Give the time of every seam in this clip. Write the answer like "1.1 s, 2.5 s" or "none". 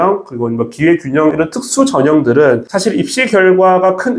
1.3 s, 2.7 s